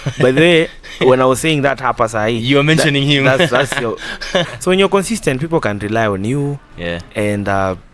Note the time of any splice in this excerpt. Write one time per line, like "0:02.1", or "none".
0:04.5